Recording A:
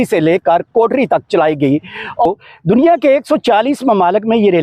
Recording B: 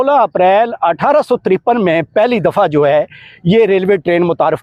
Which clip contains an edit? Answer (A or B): A